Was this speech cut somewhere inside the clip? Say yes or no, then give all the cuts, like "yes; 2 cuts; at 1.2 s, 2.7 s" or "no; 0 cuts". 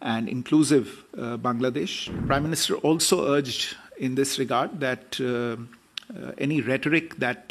yes; 1 cut; at 2.2 s